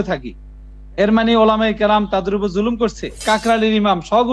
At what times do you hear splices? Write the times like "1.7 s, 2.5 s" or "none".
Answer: 3.2 s